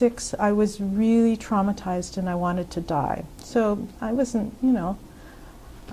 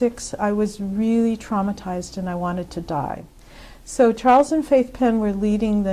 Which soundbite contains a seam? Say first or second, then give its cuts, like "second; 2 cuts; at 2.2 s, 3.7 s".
second; 1 cut; at 3.3 s